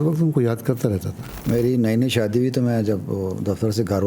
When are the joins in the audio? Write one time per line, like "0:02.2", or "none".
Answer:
0:01.4